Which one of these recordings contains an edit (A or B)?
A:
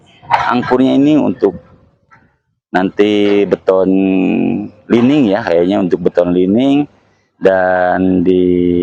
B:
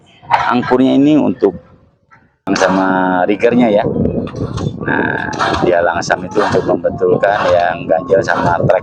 B